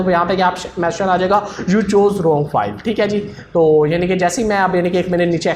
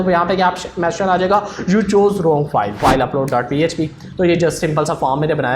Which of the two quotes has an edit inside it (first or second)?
second